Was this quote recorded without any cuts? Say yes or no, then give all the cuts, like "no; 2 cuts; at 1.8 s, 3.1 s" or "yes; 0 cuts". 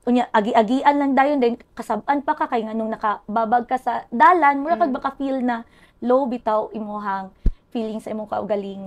yes; 0 cuts